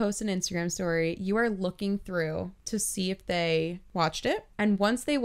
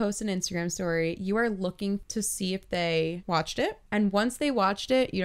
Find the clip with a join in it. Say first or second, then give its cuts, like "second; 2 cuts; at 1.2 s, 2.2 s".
second; 2 cuts; at 2.1 s, 3.2 s